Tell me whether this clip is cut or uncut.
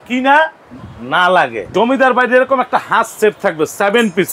cut